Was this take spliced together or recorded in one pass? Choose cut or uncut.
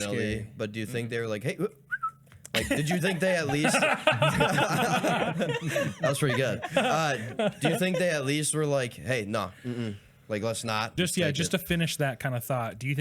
cut